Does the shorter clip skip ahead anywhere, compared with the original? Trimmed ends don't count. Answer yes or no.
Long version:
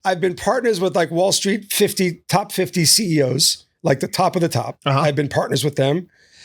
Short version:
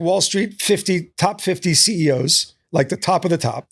no